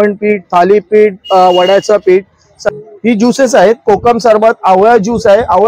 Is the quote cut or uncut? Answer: cut